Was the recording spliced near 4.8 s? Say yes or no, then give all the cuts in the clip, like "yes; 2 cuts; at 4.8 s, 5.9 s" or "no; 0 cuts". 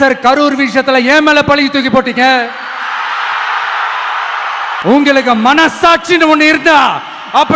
yes; 1 cut; at 4.8 s